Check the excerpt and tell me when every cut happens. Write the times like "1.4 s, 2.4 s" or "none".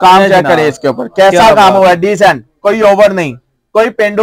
none